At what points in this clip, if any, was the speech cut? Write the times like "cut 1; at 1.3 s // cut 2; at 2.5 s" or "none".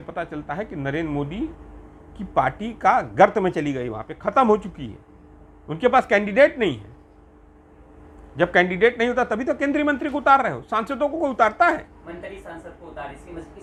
none